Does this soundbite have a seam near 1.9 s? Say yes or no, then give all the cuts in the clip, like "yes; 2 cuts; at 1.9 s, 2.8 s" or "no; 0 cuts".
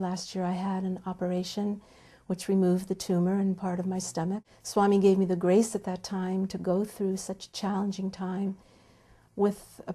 no; 1 cut; at 4.4 s